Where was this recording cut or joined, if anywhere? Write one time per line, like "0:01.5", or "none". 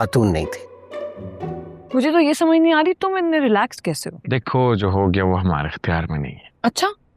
0:01.7